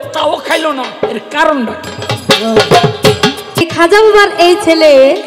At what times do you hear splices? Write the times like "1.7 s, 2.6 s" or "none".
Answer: 3.7 s

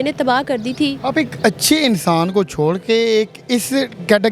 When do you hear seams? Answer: none

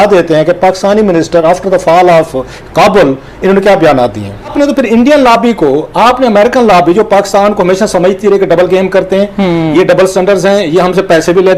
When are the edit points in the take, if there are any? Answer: 4.5 s

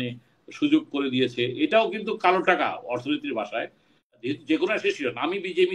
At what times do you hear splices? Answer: 4.1 s

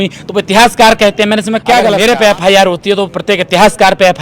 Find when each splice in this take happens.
1.9 s

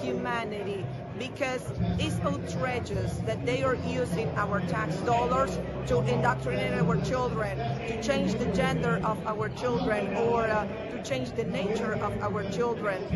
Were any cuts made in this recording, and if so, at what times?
none

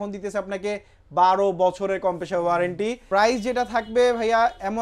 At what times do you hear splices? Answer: 3.0 s

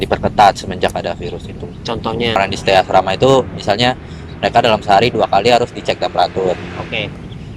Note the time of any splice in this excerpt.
2.4 s

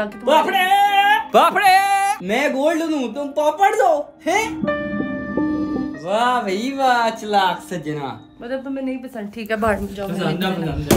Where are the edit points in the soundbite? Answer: none

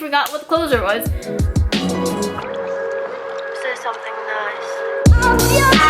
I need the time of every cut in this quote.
1.1 s

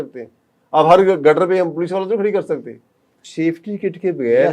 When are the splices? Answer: 3.2 s

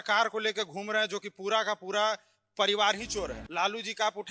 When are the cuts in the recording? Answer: 3.4 s

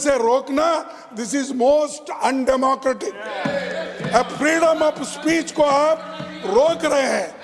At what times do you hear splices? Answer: none

